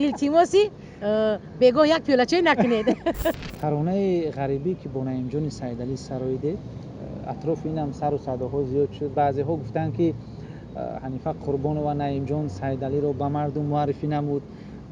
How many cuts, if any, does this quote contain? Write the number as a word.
one